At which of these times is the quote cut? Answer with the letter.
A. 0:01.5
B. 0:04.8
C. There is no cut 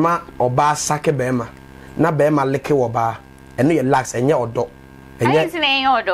C